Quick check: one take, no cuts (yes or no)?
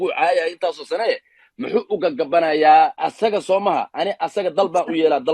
no